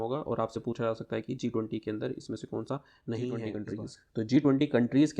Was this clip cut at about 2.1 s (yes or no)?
no